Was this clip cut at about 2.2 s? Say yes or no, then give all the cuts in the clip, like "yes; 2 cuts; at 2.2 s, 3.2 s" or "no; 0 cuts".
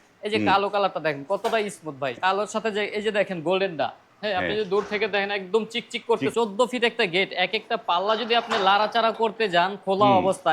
yes; 2 cuts; at 2.2 s, 6.3 s